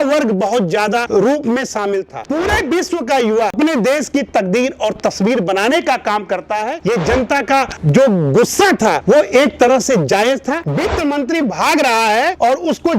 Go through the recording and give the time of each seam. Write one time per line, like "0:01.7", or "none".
0:02.2
0:03.5
0:06.8
0:10.7